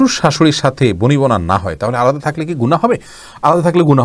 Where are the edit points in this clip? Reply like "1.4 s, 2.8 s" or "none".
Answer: none